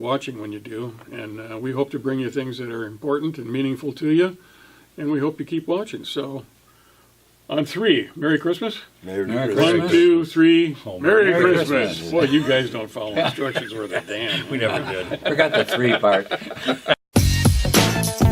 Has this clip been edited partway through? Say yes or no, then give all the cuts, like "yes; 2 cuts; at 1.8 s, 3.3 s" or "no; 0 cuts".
yes; 1 cut; at 17.0 s